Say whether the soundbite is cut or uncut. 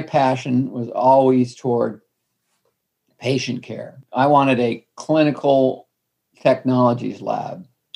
uncut